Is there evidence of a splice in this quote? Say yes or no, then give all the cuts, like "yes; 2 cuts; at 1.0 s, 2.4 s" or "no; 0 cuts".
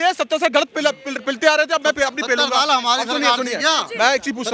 no; 0 cuts